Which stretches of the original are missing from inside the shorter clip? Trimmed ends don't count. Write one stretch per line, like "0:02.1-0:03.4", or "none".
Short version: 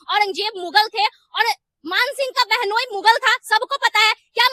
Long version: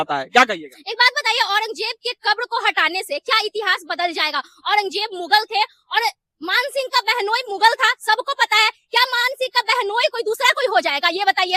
none